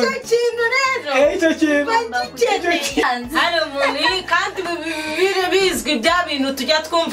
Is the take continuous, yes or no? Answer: no